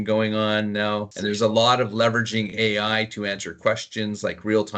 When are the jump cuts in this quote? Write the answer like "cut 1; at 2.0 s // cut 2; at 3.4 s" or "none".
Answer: cut 1; at 1.1 s